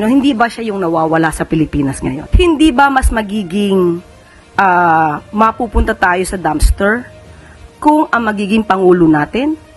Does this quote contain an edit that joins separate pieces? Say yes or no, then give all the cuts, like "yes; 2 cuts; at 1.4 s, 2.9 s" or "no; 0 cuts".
yes; 1 cut; at 2.2 s